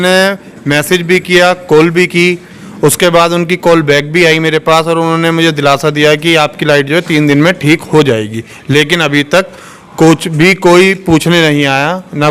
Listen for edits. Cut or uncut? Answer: uncut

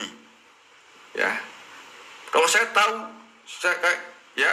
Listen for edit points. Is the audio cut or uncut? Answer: uncut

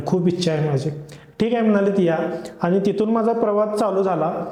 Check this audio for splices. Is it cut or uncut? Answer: uncut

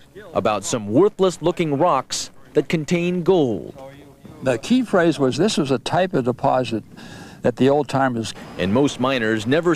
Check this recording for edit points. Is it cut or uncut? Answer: uncut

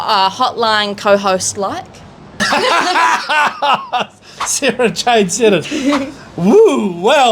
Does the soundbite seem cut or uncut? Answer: cut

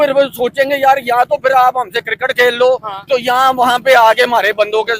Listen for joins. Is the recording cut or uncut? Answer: uncut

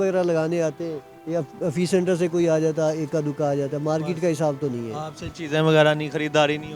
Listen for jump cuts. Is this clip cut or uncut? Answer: uncut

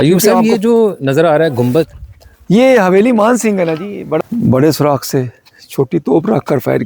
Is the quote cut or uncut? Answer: cut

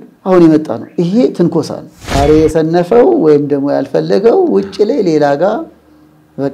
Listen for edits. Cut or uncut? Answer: cut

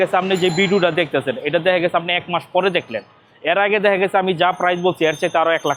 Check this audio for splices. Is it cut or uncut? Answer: uncut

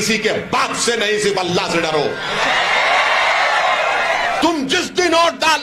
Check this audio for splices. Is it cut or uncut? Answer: cut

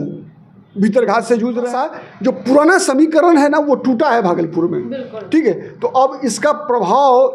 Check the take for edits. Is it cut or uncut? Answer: cut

